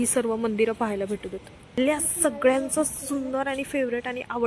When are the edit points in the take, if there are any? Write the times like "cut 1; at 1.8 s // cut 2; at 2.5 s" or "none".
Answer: cut 1; at 1.7 s